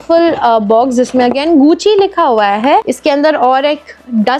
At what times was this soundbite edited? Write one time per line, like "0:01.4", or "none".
0:02.9